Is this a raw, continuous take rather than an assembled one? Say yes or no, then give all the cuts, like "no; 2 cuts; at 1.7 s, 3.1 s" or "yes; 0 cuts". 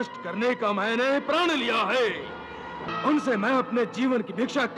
no; 1 cut; at 2.9 s